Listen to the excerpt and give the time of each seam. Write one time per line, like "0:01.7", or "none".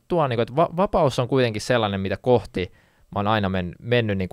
none